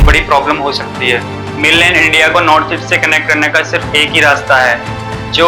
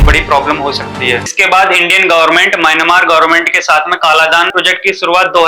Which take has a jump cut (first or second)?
second